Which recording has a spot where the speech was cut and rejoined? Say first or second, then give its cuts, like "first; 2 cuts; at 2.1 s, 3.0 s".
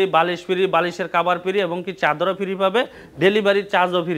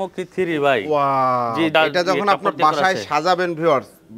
second; 1 cut; at 1.7 s